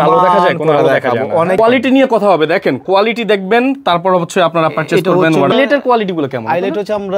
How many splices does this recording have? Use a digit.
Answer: 2